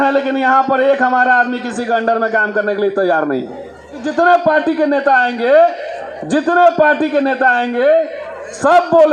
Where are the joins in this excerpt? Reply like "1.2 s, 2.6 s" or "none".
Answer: 4.0 s